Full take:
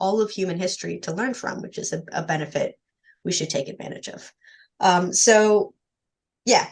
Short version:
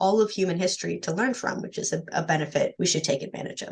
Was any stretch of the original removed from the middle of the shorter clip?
yes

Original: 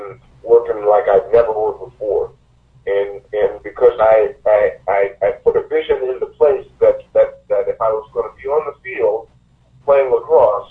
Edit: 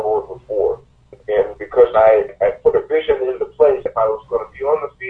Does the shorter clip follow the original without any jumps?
no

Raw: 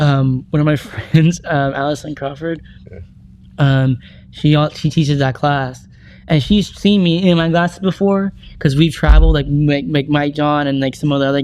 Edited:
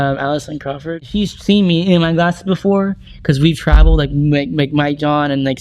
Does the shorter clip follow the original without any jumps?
no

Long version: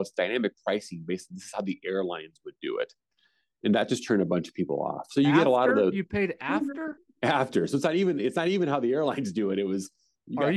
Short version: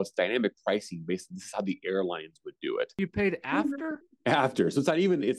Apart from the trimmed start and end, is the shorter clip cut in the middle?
yes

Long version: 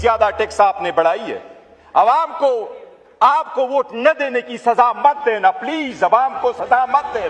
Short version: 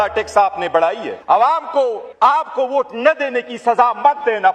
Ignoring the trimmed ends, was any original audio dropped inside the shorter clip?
yes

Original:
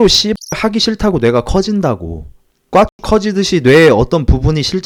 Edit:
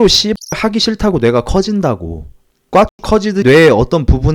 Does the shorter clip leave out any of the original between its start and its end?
yes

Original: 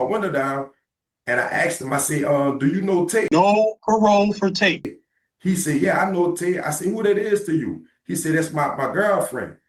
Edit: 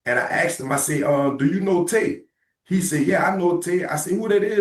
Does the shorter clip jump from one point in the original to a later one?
yes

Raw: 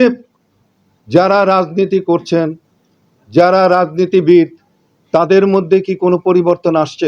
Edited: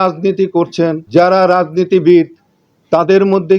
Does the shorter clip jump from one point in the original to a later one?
yes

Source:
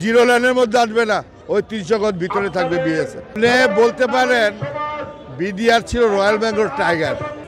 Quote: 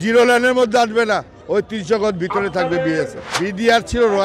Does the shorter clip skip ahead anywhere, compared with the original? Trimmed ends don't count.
yes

